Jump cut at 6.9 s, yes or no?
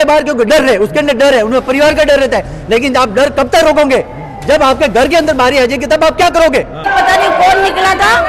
yes